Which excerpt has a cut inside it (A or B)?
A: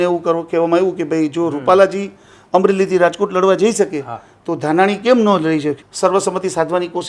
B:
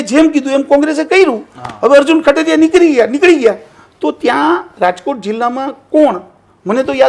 A